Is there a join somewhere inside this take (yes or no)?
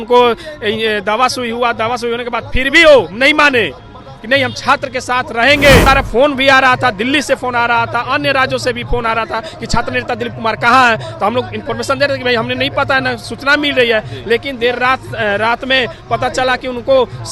yes